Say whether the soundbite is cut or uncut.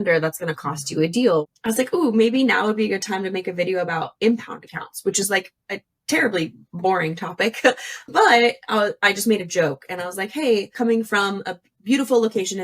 cut